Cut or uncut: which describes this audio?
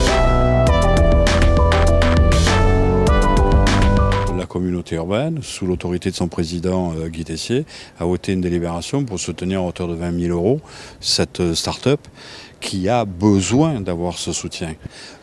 cut